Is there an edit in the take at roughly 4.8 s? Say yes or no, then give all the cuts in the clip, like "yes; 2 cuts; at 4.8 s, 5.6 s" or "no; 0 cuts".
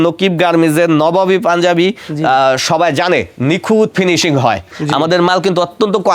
yes; 1 cut; at 4.8 s